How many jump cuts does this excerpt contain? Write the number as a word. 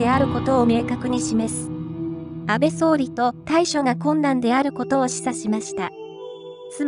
one